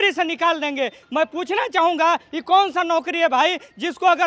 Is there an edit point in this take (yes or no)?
no